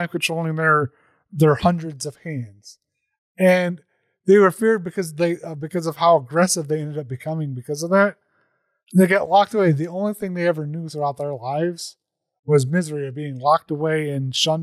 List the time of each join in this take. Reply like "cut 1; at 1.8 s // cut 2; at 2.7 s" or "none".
none